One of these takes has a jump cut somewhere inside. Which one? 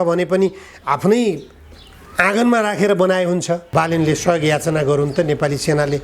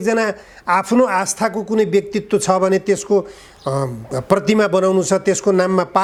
first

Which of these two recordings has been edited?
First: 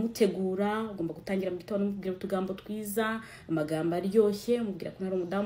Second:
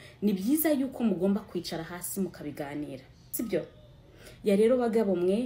second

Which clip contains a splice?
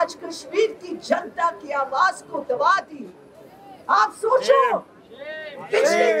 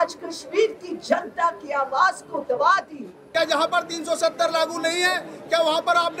second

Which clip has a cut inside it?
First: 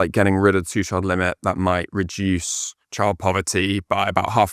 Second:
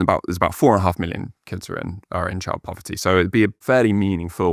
second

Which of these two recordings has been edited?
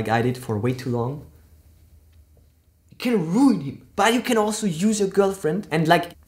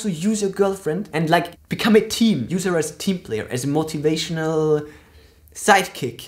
first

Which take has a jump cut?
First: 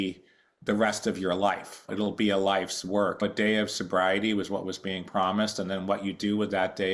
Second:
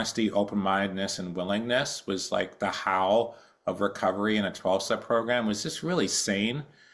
first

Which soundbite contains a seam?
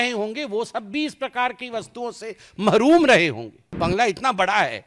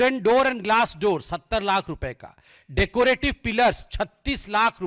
first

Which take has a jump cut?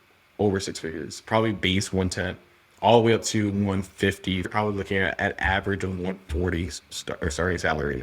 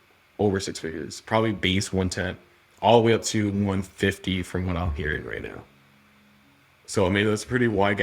first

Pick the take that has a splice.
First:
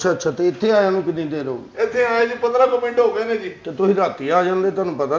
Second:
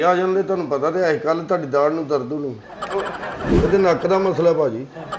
second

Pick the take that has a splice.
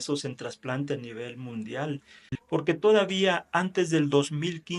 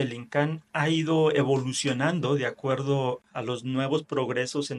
first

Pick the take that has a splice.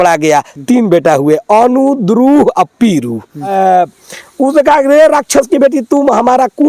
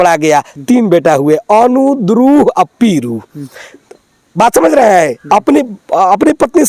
first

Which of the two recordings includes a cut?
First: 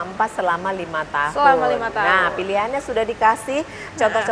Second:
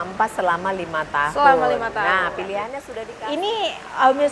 second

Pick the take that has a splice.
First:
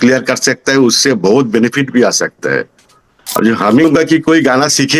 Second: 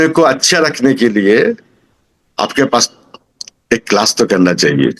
first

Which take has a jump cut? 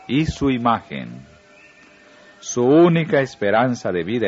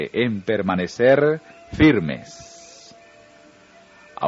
first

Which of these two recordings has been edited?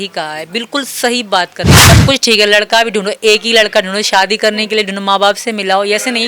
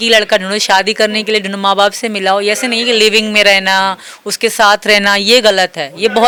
first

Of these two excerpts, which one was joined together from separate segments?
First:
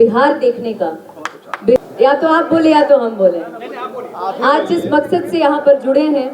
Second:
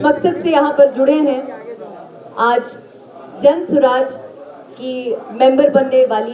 first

